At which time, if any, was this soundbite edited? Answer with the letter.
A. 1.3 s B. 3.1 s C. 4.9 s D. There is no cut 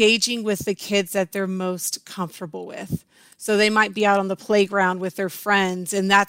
D